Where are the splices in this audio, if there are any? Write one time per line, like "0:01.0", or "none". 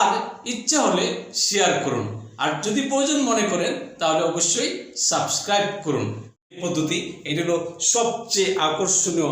0:06.4